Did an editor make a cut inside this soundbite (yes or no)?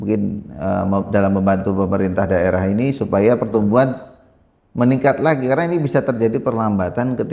no